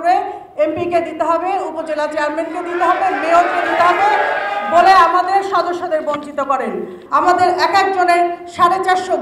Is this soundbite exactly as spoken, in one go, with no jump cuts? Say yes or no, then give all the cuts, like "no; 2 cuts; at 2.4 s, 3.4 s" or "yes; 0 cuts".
no; 1 cut; at 7.0 s